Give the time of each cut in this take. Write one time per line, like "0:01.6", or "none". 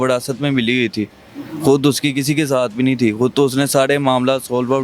none

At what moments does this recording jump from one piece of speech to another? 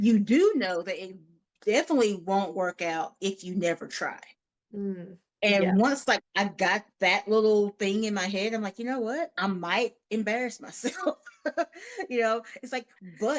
0:09.3

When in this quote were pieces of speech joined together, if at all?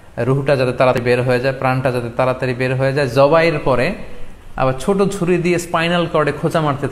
0:01.0

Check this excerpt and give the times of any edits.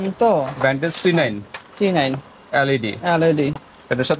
none

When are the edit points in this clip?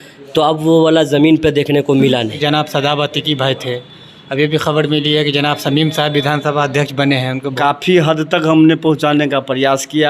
0:02.4
0:07.4

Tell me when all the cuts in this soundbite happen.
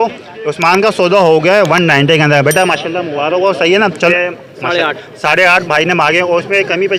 0:04.1

